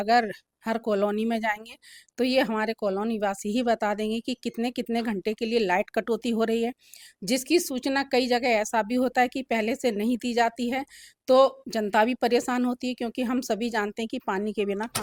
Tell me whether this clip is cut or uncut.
uncut